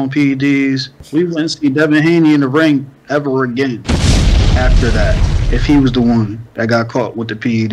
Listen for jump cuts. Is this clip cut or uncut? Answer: cut